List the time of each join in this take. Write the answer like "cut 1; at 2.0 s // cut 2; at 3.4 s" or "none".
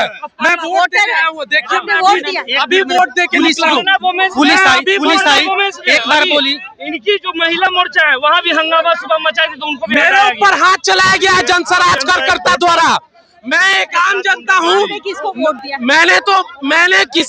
none